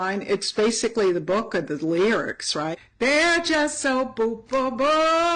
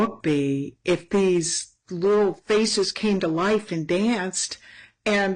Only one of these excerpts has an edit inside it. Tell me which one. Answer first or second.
first